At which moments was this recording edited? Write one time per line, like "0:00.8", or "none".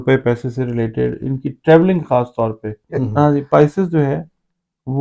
0:03.0